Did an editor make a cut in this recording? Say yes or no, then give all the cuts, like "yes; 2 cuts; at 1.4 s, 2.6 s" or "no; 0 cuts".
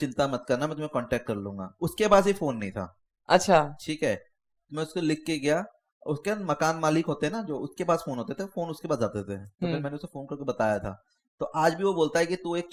no; 0 cuts